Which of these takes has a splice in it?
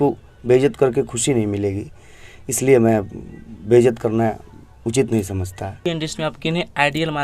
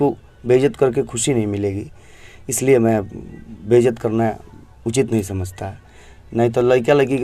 first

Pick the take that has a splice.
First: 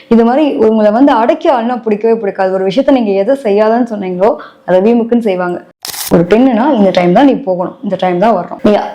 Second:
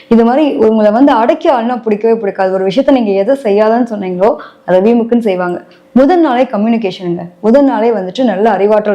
first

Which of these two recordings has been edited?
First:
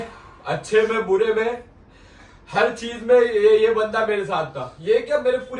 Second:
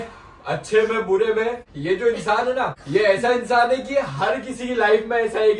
second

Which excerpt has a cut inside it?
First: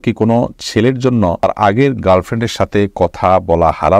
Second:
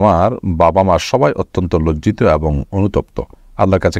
first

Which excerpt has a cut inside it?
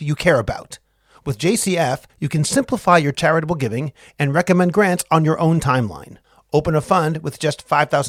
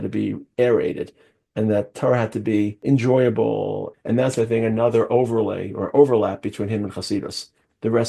second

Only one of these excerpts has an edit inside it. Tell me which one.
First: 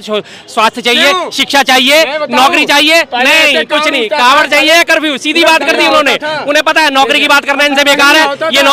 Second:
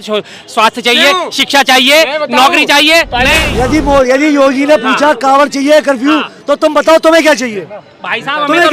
second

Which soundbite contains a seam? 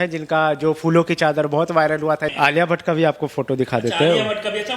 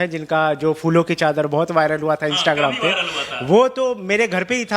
first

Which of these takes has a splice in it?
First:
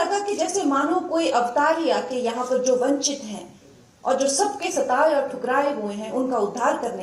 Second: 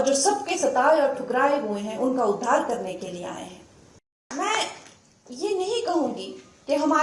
second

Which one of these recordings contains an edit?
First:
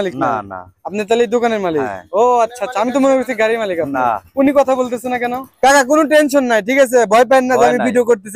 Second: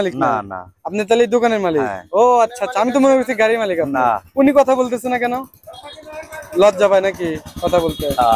first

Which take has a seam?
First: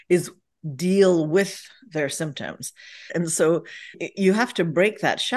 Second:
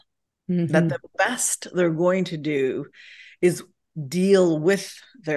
first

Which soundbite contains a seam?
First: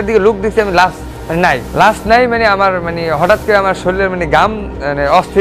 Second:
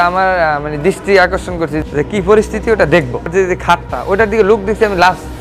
second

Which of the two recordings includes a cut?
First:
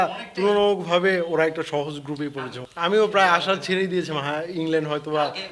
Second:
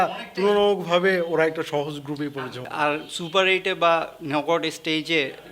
first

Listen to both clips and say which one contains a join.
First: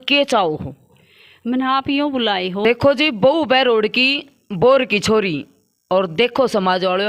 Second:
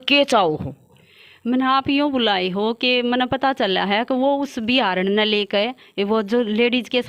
first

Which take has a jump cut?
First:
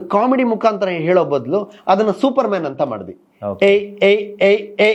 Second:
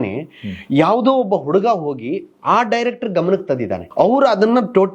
second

